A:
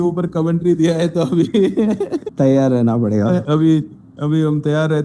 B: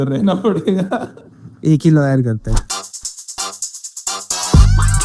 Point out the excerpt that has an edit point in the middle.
A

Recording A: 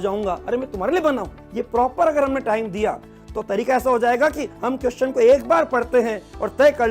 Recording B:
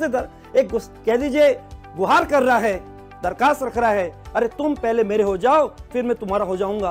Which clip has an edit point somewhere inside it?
A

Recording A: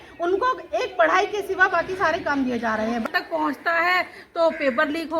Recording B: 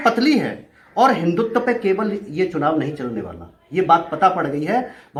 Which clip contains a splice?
A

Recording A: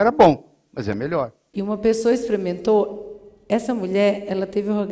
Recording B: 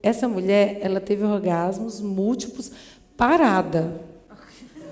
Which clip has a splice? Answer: A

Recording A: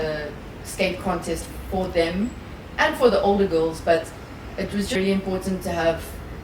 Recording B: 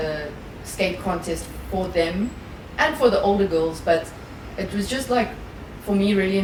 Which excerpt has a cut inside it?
A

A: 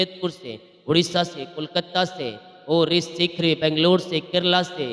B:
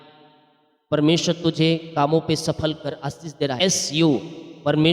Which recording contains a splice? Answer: B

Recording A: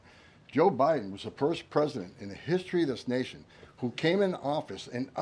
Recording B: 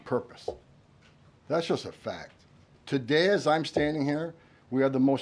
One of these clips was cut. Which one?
B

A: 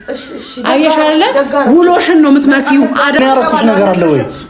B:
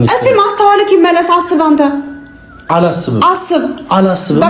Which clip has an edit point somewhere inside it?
A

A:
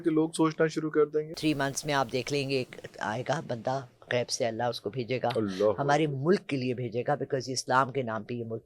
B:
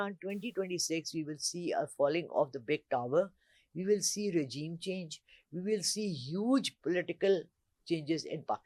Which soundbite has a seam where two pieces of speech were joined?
A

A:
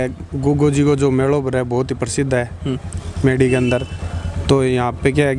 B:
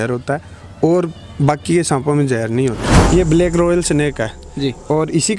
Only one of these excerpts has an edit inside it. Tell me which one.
B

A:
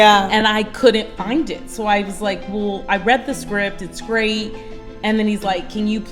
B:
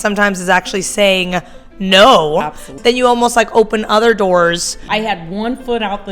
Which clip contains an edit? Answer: B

